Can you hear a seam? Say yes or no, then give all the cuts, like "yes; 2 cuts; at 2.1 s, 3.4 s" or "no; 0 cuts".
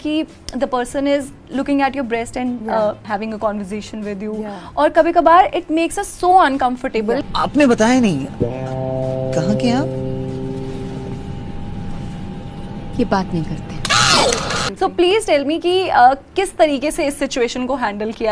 yes; 3 cuts; at 3.0 s, 7.2 s, 14.7 s